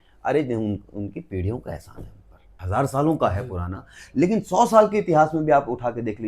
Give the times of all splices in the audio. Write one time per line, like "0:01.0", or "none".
0:02.6